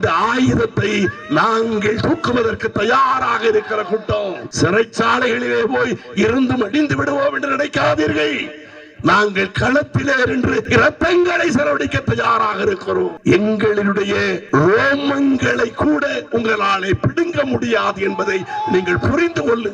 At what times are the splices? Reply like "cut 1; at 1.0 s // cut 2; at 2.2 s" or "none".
cut 1; at 4.4 s // cut 2; at 10.7 s // cut 3; at 13.2 s // cut 4; at 14.4 s